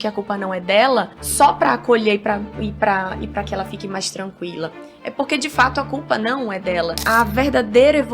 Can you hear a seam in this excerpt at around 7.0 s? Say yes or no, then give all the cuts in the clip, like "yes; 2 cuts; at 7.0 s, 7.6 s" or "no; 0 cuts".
yes; 2 cuts; at 1.2 s, 7.0 s